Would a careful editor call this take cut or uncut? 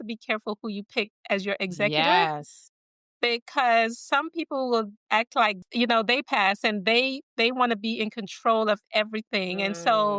cut